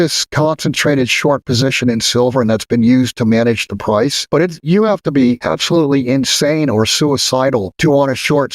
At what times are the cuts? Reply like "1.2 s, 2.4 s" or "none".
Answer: 4.2 s, 5.4 s, 7.7 s